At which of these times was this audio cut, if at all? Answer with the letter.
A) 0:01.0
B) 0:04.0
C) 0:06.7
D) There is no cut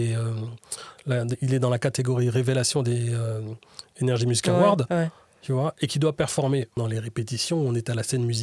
C